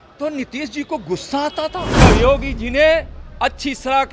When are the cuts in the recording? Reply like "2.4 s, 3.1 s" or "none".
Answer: 2.0 s